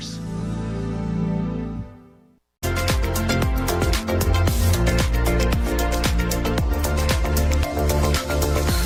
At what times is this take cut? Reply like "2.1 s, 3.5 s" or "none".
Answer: none